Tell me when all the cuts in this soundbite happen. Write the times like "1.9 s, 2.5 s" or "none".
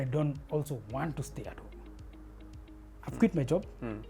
2.9 s